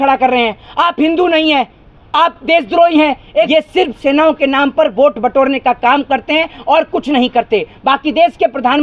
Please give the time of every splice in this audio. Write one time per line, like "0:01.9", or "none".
0:03.5